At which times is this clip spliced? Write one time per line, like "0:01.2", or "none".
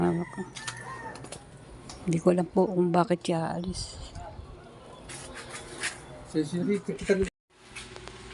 0:07.4